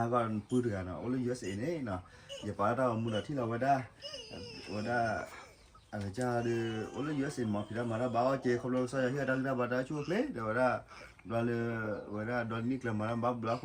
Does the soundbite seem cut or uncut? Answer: uncut